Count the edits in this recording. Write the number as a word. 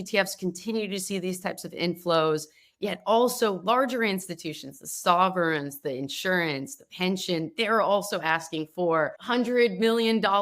one